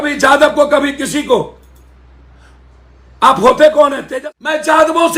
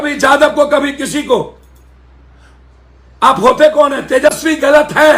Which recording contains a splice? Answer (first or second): first